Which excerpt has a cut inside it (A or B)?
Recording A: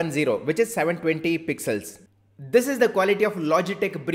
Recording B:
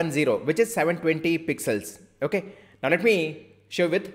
A